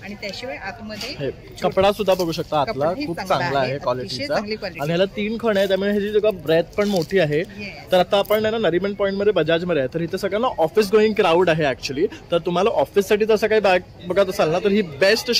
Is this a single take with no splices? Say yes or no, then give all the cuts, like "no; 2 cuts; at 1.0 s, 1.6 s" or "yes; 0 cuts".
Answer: yes; 0 cuts